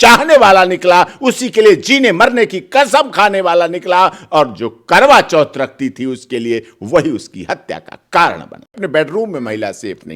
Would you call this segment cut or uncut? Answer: cut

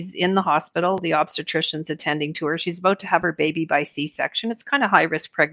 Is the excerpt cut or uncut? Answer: uncut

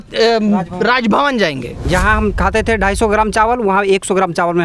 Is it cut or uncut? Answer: cut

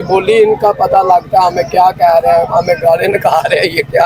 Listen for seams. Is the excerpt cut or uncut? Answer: uncut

